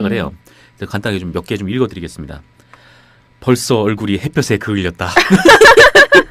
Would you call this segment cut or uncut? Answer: uncut